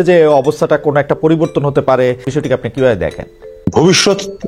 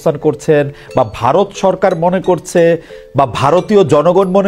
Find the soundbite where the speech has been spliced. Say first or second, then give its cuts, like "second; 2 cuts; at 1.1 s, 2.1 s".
first; 2 cuts; at 2.2 s, 3.7 s